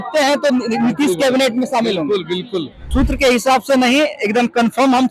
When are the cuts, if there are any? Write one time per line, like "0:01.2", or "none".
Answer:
0:02.8